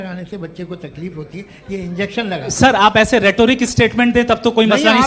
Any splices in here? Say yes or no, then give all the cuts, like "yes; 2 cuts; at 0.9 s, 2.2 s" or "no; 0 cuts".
no; 0 cuts